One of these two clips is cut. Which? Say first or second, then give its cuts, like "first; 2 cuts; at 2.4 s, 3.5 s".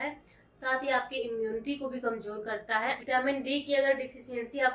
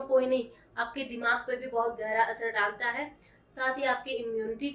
first; 1 cut; at 3.0 s